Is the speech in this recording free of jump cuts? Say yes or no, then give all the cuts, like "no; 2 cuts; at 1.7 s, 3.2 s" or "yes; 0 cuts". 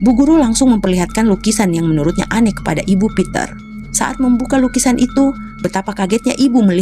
yes; 0 cuts